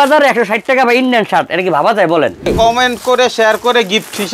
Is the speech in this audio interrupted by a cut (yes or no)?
yes